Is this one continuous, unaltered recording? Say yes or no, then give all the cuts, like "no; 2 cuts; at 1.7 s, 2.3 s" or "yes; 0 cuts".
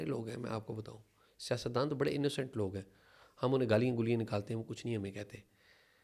yes; 0 cuts